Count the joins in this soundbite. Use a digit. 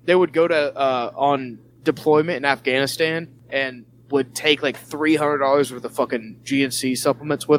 2